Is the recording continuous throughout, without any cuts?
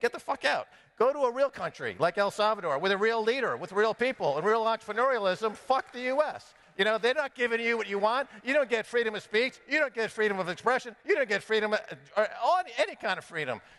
yes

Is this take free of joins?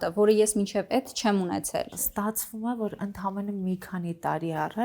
no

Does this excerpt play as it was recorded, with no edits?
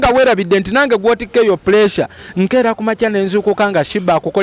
yes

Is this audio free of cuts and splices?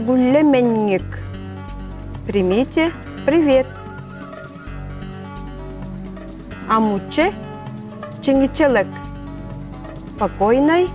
yes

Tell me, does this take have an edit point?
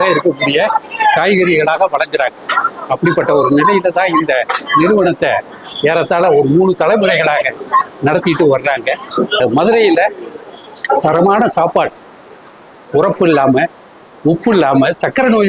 no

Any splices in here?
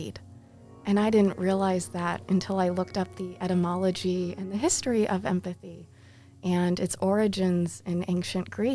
no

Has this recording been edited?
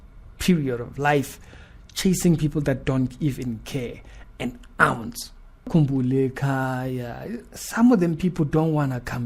yes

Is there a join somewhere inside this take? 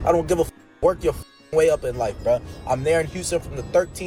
no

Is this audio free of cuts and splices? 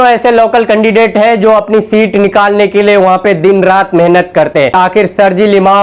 no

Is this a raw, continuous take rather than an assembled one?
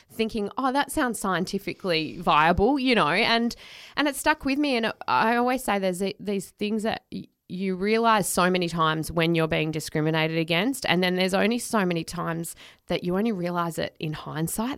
yes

